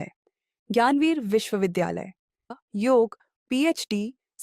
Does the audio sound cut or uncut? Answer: cut